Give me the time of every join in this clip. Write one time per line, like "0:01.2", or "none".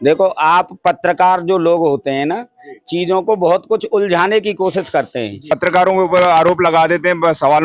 0:05.5